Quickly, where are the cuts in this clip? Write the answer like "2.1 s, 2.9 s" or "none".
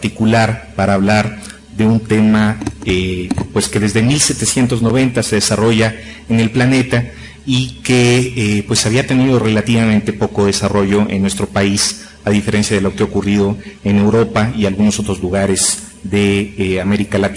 13.3 s